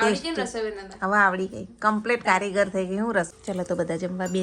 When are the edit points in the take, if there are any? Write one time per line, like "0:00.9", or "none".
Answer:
0:03.3